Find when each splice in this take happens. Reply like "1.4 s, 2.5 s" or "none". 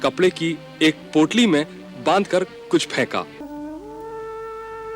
3.4 s